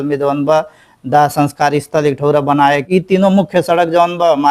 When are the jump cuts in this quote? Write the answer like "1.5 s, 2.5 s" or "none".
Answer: 2.9 s